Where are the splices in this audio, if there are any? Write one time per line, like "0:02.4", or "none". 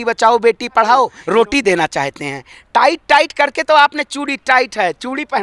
0:01.2